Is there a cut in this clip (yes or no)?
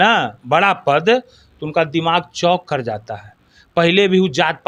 no